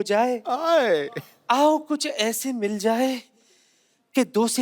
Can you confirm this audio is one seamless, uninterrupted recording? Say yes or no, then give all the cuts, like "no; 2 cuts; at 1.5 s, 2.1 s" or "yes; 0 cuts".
yes; 0 cuts